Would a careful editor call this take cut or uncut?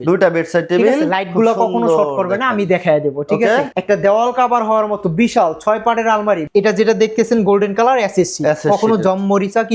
cut